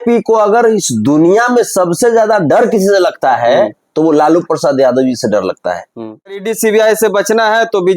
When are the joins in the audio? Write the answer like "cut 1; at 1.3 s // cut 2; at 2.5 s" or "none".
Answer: cut 1; at 6.5 s